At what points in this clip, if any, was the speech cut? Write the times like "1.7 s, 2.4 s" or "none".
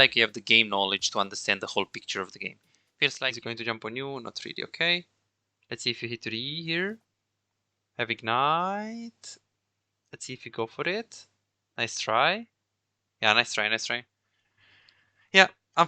3.2 s